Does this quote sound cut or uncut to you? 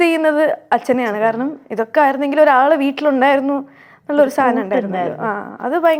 uncut